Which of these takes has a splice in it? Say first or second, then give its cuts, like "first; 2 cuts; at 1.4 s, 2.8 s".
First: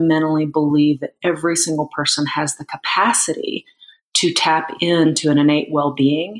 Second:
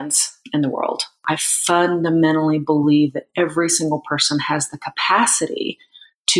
second; 1 cut; at 1.2 s